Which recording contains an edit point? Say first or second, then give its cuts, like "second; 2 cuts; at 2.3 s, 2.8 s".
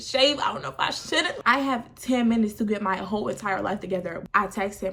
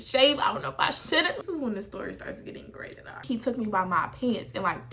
second; 2 cuts; at 1.3 s, 3.1 s